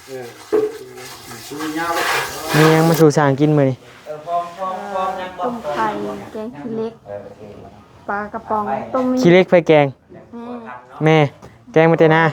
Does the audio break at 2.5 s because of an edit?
yes; 1 cut; at 2.5 s

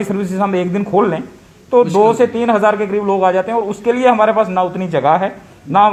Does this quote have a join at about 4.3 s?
no; 0 cuts

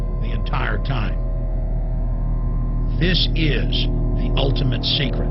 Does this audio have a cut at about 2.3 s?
no; 1 cut; at 1.0 s

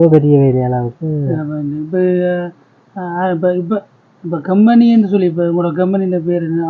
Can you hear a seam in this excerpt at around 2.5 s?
no; 0 cuts

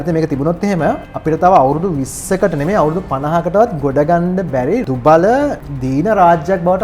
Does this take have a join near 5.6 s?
yes; 3 cuts; at 1.1 s, 4.9 s, 5.6 s

